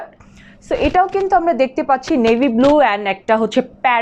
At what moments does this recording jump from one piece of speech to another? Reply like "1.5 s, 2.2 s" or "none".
none